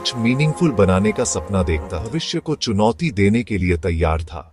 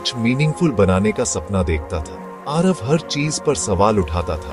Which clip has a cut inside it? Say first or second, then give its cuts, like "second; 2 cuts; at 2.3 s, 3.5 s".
first; 1 cut; at 2.1 s